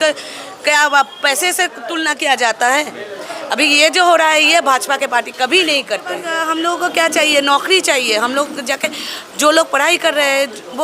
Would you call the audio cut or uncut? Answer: cut